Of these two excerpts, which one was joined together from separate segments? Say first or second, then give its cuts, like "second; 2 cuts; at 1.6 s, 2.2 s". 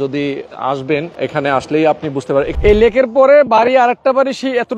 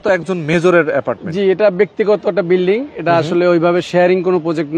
first; 2 cuts; at 1.1 s, 2.5 s